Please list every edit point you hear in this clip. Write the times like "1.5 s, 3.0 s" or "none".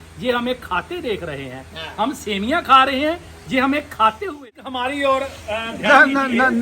4.4 s